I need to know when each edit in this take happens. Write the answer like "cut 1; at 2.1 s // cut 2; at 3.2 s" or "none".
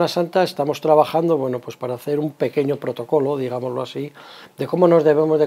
none